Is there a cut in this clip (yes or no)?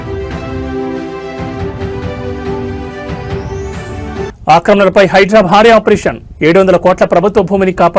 no